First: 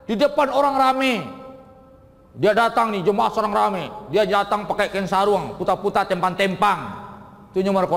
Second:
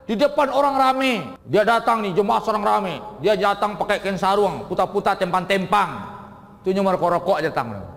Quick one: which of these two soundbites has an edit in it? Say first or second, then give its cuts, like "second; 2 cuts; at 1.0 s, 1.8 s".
second; 1 cut; at 1.3 s